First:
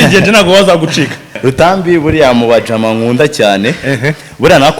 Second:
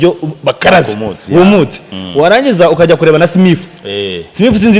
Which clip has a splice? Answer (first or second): first